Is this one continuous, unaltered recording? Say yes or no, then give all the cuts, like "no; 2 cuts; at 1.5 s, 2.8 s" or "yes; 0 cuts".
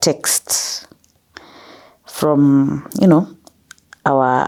yes; 0 cuts